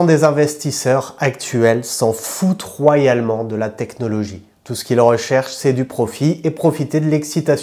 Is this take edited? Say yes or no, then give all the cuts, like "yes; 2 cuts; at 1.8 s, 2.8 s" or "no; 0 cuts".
yes; 1 cut; at 4.6 s